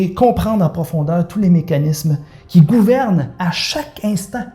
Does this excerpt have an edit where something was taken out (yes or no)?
no